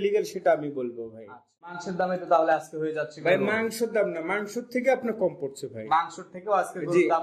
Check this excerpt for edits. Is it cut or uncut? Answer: cut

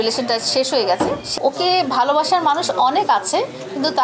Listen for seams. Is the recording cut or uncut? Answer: cut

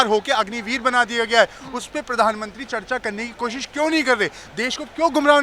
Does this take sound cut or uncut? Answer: uncut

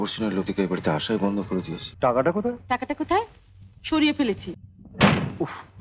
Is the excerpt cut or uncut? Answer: cut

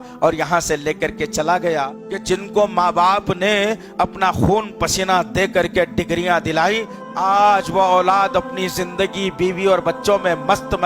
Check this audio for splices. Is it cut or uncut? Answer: cut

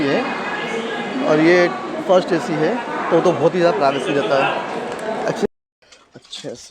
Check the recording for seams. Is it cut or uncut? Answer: cut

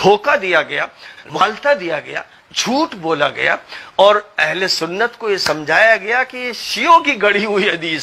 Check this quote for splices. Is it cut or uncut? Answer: cut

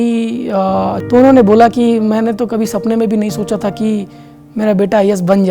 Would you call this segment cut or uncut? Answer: cut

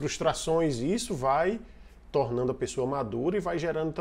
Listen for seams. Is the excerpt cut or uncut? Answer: uncut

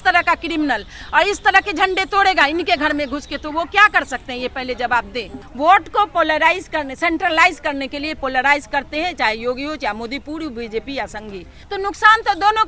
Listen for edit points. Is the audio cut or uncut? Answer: cut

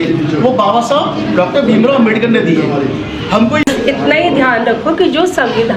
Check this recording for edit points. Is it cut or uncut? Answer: cut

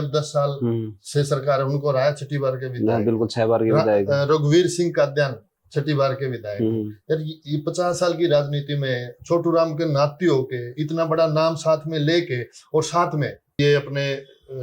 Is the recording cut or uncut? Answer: cut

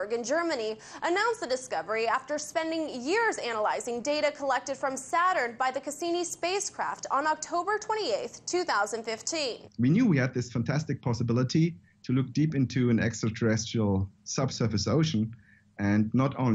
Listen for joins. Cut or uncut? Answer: cut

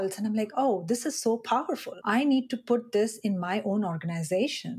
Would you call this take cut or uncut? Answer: cut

